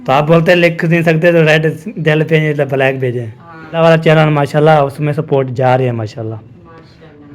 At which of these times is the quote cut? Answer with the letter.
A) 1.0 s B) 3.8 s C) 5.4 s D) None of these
B